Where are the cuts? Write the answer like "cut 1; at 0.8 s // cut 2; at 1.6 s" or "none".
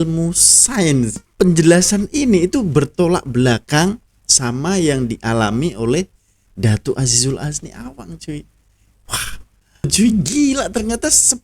cut 1; at 1.1 s // cut 2; at 9.9 s